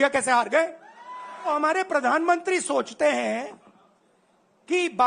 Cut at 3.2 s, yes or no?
no